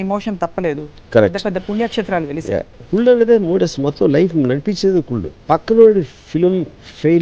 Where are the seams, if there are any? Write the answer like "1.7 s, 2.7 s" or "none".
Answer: 5.3 s